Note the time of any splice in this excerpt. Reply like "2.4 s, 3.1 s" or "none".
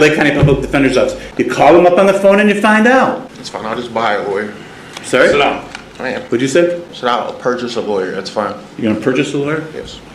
1.2 s, 3.3 s, 6.2 s, 6.9 s